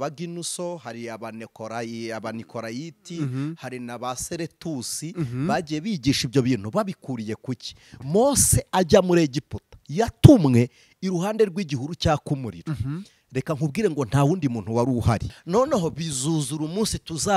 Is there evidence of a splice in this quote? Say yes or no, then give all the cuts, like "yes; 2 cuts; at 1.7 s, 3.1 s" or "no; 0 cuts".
yes; 2 cuts; at 8.0 s, 15.4 s